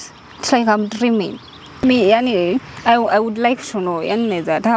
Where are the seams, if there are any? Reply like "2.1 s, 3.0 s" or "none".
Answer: 1.8 s

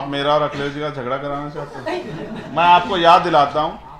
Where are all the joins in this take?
none

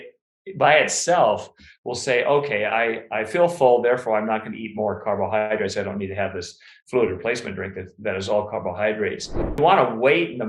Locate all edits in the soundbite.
9.6 s

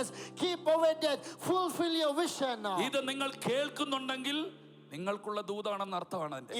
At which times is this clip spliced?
none

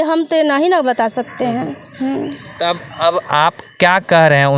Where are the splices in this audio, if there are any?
none

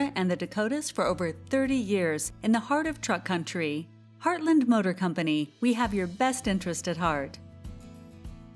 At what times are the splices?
7.3 s

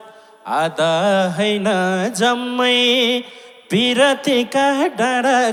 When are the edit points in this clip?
none

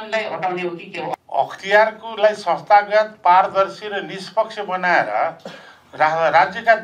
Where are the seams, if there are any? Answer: 1.1 s

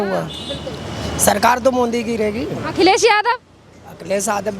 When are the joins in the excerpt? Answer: none

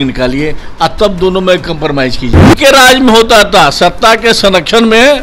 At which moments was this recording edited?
2.5 s

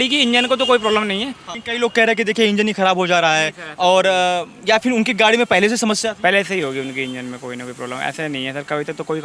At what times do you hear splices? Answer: 1.4 s

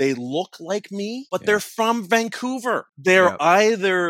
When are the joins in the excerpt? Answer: 1.2 s, 2.9 s

